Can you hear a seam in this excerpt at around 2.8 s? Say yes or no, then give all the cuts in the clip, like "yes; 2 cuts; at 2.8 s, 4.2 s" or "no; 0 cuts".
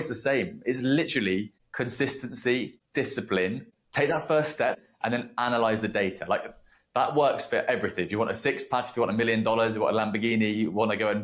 yes; 4 cuts; at 1.6 s, 2.8 s, 3.7 s, 4.8 s